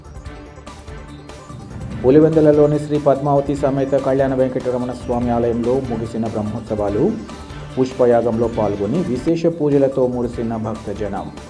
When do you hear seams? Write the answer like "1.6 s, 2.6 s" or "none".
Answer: 2.0 s